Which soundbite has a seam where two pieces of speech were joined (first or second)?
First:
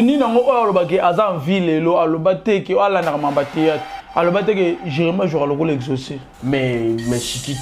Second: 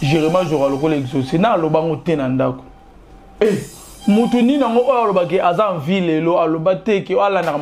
first